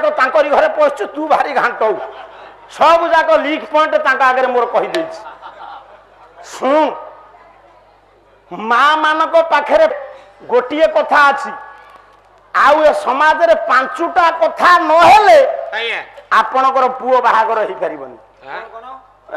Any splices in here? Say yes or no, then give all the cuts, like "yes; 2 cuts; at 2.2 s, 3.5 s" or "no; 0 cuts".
yes; 1 cut; at 10.1 s